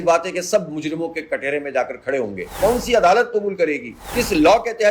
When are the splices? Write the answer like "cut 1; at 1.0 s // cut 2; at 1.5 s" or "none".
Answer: cut 1; at 2.5 s